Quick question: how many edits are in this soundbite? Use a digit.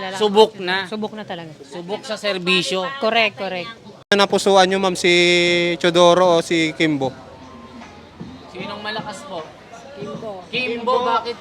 1